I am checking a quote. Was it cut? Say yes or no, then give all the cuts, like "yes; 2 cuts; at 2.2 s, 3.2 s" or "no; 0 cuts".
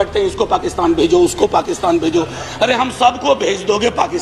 no; 0 cuts